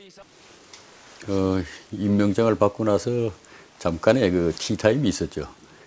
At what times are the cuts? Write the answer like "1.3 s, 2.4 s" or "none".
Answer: none